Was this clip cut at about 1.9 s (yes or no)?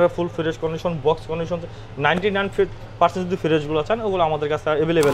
no